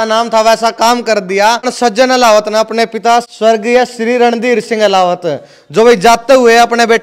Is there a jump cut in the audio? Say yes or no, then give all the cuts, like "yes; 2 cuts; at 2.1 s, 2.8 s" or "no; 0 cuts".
yes; 2 cuts; at 1.7 s, 3.3 s